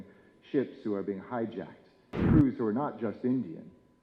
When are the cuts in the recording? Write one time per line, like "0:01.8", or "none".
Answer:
0:02.1

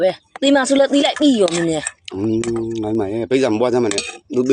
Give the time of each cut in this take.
none

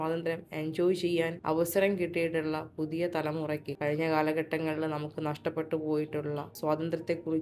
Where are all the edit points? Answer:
0:01.4
0:03.7
0:06.5

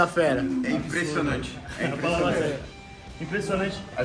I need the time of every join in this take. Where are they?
none

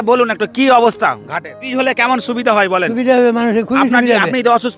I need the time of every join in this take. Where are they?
0:01.6

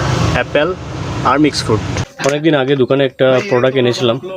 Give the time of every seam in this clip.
0:02.0

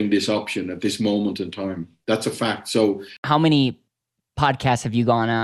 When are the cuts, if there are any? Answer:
0:03.2

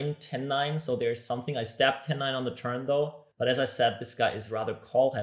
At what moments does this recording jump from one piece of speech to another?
0:03.2

